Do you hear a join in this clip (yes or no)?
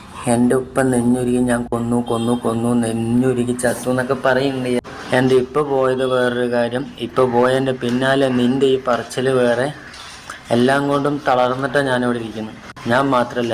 yes